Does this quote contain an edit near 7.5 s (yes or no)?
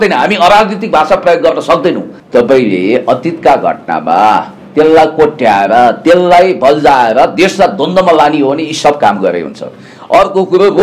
no